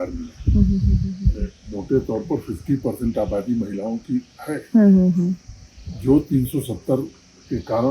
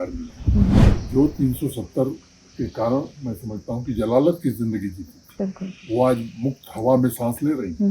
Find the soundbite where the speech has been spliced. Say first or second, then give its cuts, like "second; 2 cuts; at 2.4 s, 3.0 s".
second; 1 cut; at 0.9 s